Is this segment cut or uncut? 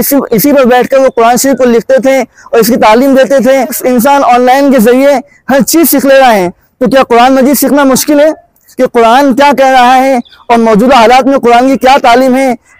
cut